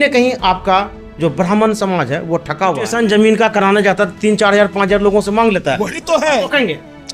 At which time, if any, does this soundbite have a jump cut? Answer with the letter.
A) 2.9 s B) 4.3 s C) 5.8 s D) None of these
A